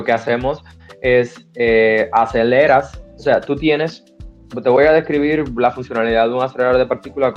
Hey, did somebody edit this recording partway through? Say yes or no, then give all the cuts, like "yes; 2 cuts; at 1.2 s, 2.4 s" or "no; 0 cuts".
no; 0 cuts